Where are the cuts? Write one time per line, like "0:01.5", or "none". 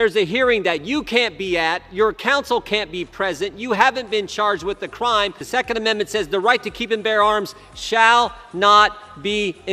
0:05.4

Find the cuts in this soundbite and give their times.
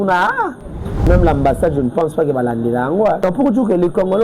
0:01.1
0:03.2

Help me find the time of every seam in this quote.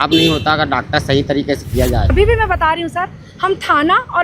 0:02.0

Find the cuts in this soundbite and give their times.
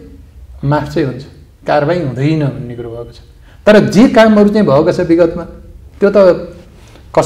none

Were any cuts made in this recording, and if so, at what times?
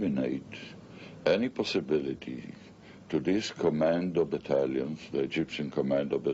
0:01.1

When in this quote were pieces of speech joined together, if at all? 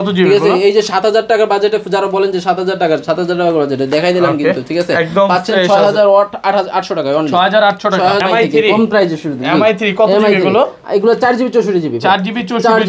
0:08.2

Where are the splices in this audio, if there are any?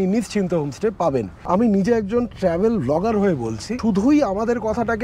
0:01.4
0:03.7

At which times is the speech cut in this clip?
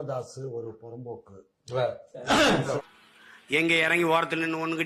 0:02.8

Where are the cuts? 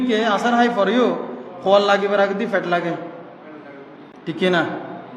none

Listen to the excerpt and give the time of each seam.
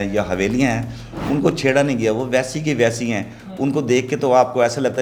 none

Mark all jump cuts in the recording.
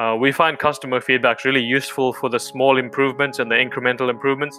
none

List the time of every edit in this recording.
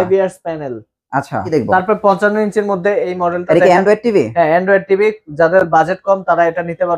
0:01.5

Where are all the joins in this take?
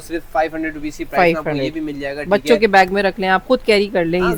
none

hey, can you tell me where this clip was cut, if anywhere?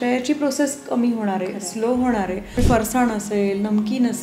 0:02.5

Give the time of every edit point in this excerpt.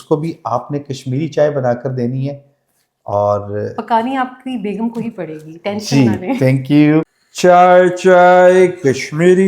0:07.2

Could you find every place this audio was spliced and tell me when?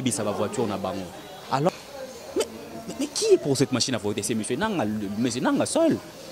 0:01.8

